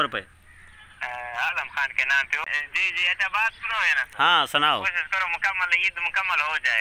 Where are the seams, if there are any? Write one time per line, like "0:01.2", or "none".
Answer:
0:02.4